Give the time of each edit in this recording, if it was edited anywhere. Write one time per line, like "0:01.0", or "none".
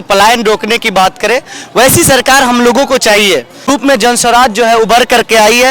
0:03.7